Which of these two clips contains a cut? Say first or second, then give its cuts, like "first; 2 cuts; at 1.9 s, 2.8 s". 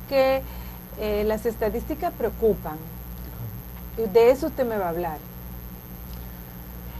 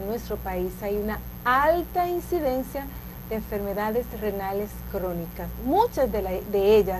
second; 1 cut; at 5.4 s